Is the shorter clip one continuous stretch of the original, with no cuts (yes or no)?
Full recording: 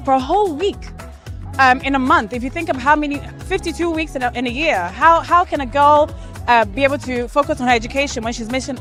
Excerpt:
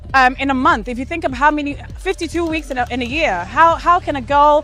yes